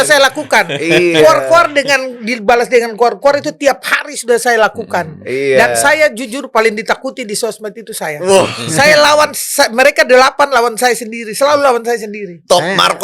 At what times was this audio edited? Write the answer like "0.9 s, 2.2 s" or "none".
none